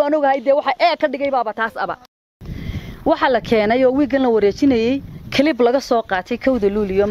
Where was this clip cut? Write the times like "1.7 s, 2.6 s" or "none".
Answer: 2.2 s